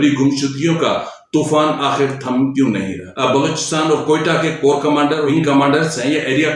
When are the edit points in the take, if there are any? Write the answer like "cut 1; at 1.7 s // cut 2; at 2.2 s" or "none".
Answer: cut 1; at 3.0 s // cut 2; at 5.3 s